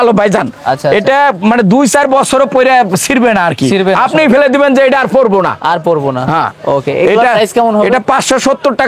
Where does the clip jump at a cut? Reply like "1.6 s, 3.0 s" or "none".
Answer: none